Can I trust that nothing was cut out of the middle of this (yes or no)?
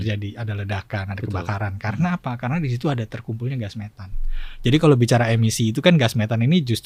yes